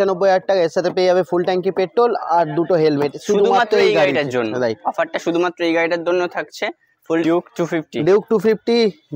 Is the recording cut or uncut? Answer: cut